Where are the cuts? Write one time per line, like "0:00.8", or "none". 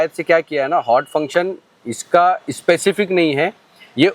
none